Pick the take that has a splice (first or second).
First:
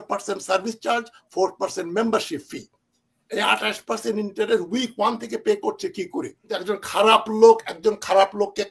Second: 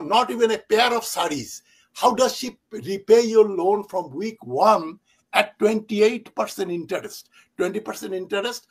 first